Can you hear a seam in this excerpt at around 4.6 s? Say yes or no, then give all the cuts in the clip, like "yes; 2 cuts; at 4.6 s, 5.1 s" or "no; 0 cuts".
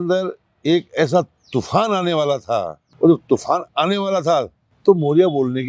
yes; 2 cuts; at 2.8 s, 4.6 s